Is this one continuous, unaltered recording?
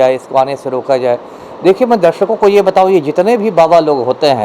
yes; 0 cuts

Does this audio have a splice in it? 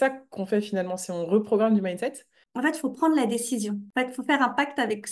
yes; 2 cuts; at 2.4 s, 3.9 s

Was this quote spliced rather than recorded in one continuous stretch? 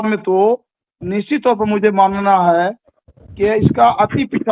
no; 0 cuts

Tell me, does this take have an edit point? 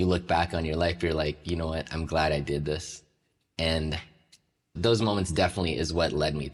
no; 0 cuts

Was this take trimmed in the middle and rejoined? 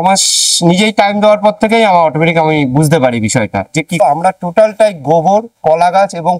yes; 1 cut; at 4.0 s

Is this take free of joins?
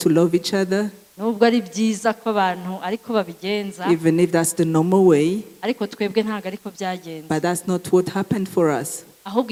yes; 0 cuts

